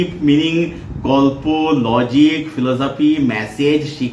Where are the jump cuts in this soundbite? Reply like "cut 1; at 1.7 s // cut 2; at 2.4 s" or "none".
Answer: none